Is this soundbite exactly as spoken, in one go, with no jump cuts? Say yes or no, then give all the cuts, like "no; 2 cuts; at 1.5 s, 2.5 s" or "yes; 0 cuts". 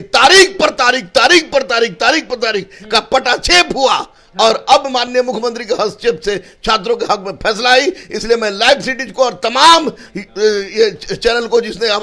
yes; 0 cuts